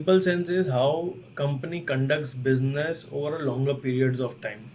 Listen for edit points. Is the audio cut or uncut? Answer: uncut